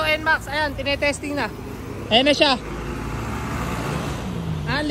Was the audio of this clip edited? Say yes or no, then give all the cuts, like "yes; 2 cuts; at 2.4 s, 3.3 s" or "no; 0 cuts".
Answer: no; 0 cuts